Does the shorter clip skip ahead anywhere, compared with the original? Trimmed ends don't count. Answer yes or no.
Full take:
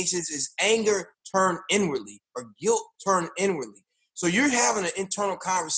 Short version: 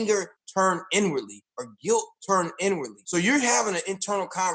yes